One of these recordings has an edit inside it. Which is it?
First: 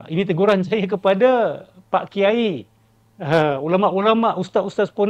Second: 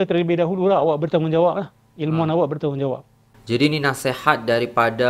second; 1 cut; at 3.3 s

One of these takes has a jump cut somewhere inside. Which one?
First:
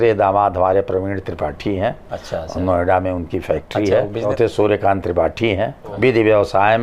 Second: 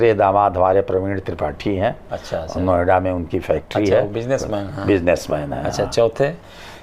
first; 2 cuts; at 4.2 s, 5.9 s

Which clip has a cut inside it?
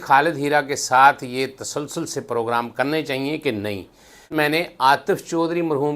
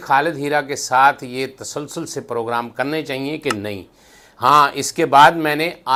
first; 1 cut; at 4.3 s

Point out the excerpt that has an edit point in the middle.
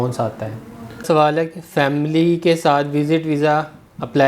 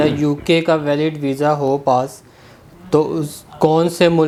first; 1 cut; at 1.0 s

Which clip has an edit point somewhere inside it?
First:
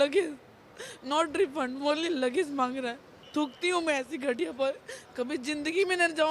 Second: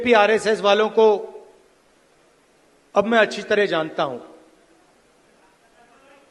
first; 1 cut; at 3.2 s

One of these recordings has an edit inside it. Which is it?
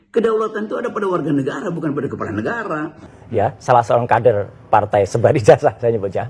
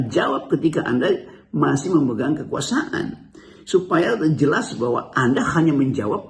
first; 1 cut; at 3.0 s

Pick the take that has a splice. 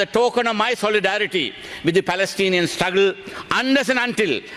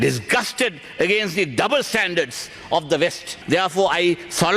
second; 1 cut; at 3.3 s

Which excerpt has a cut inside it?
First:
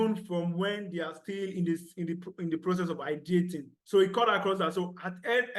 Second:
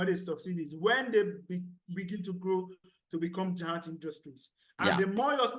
first; 1 cut; at 3.7 s

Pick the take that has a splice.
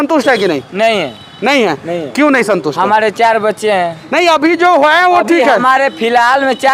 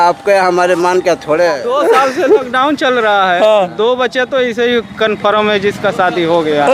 second; 1 cut; at 1.6 s

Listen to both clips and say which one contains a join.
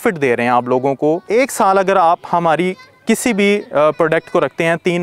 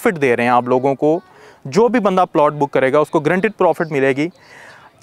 first; 1 cut; at 1.2 s

